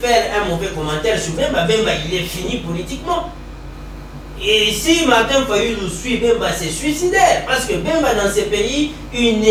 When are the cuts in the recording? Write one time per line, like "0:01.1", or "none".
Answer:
none